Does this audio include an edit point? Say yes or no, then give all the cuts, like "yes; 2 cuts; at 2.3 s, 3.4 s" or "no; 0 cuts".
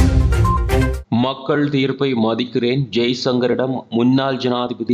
yes; 1 cut; at 1.0 s